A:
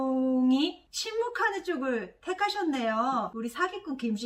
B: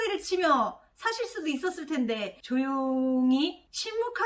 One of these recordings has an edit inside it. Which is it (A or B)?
A